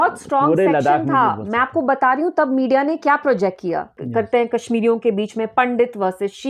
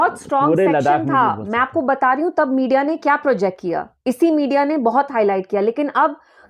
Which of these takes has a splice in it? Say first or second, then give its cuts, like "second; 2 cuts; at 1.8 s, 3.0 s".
first; 1 cut; at 4.0 s